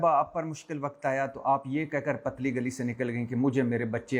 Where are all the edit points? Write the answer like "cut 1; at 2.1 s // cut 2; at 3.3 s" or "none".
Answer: none